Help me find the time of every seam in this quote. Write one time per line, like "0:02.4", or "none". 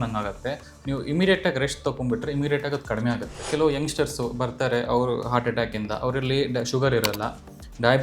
0:03.4